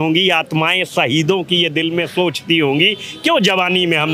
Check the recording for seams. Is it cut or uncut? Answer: uncut